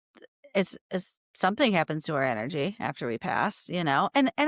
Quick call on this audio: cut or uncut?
uncut